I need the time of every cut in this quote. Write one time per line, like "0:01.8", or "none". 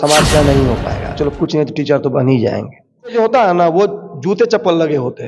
0:01.1
0:03.1